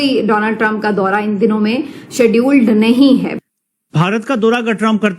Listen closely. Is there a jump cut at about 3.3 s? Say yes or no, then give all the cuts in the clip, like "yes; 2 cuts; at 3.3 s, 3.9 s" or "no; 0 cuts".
yes; 1 cut; at 3.3 s